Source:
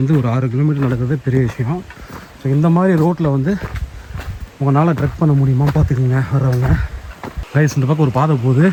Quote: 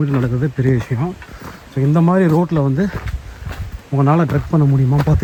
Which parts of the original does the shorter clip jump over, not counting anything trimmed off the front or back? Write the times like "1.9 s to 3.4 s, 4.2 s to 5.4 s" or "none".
none